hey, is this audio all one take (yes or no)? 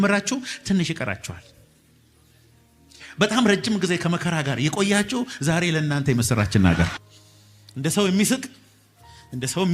no